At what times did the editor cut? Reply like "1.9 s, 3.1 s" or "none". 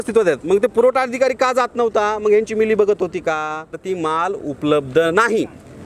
3.8 s